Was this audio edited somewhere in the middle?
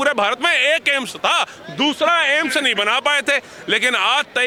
no; 0 cuts

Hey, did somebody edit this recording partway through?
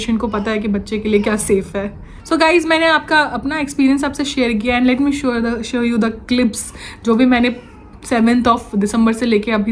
no; 0 cuts

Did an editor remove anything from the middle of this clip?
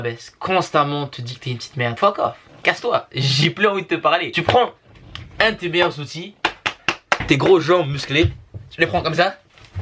yes; 2 cuts; at 1.9 s, 4.4 s

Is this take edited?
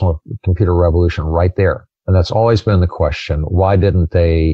yes; 1 cut; at 1.9 s

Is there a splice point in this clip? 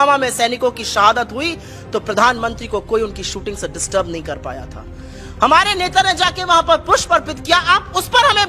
no; 0 cuts

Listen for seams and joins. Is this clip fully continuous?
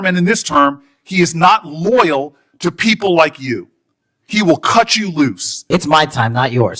no; 1 cut; at 5.6 s

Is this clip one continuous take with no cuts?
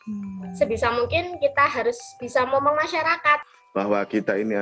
no; 1 cut; at 3.6 s

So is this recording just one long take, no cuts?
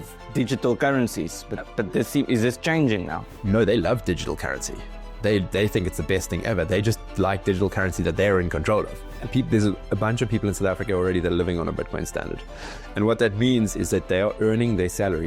no; 2 cuts; at 3.4 s, 9.1 s

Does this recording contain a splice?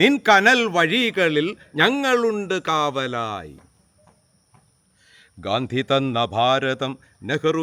no; 0 cuts

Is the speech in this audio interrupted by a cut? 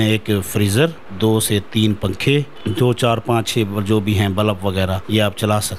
yes; 3 cuts; at 1.0 s, 2.6 s, 5.0 s

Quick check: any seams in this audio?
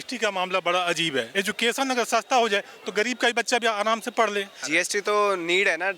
yes; 2 cuts; at 1.3 s, 4.6 s

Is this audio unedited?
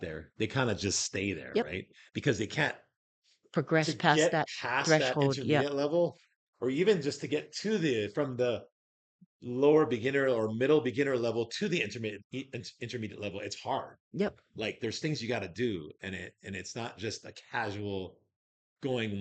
yes; 0 cuts

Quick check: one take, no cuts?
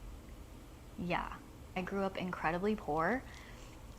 no; 1 cut; at 1.8 s

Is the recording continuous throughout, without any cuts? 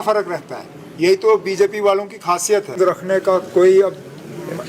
no; 1 cut; at 2.8 s

